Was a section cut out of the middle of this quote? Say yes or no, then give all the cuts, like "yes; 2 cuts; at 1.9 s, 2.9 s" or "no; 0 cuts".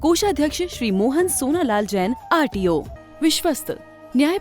yes; 1 cut; at 3.0 s